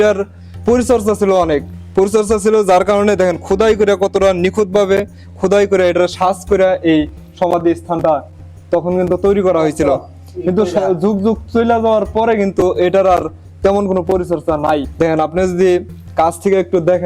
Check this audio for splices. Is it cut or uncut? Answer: uncut